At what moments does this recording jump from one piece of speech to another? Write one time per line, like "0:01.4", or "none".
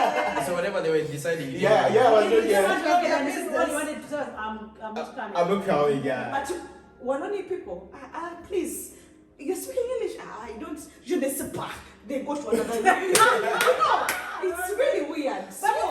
0:06.3